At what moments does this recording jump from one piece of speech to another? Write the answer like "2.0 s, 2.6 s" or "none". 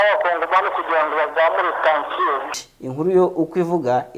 2.5 s